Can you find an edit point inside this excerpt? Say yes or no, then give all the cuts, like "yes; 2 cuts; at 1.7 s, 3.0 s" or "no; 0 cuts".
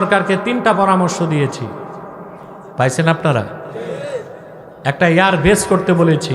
yes; 1 cut; at 2.6 s